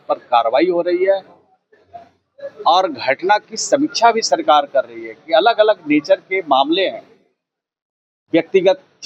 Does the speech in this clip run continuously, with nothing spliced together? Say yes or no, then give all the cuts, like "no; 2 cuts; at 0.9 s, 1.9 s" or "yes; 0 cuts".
yes; 0 cuts